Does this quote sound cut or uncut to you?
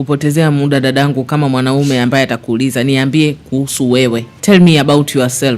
cut